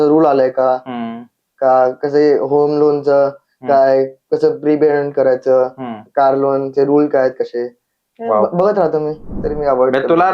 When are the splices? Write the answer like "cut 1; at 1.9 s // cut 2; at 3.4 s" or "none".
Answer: cut 1; at 9.3 s